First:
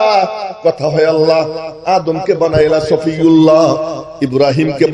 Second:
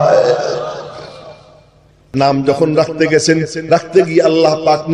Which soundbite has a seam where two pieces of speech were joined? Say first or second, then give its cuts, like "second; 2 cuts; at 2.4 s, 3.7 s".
second; 1 cut; at 2.0 s